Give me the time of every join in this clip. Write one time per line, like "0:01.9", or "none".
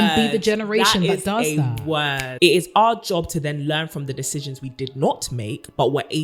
0:02.3

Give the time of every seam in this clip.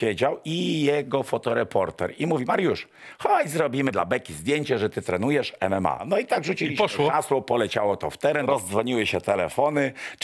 0:03.9
0:06.0
0:08.5

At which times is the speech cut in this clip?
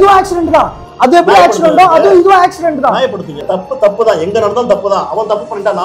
0:03.3

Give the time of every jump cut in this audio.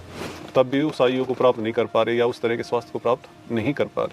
none

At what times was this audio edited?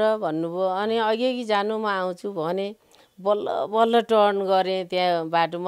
none

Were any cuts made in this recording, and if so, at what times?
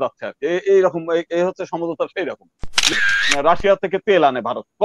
0:02.9

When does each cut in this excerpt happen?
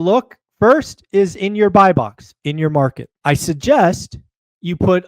0:03.1

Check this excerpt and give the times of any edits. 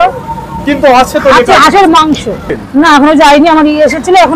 0:02.5

